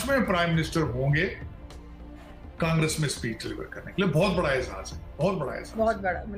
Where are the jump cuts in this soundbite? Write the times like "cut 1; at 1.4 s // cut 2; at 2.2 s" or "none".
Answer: none